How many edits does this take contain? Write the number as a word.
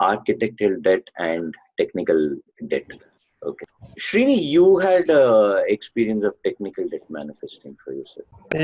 zero